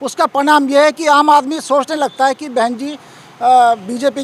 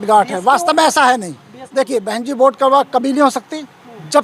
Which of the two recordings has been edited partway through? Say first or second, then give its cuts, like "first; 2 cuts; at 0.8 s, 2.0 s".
second; 1 cut; at 1.5 s